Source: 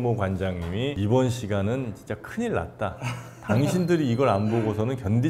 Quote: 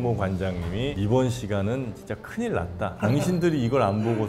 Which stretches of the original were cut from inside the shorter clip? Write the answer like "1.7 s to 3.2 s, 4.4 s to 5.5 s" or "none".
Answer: 2.9 s to 3.4 s